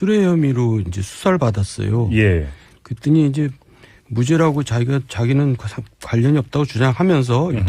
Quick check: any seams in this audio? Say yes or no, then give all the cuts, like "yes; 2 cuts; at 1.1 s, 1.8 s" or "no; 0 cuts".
yes; 1 cut; at 5.2 s